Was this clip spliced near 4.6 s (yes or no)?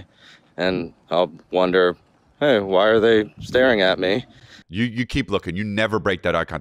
yes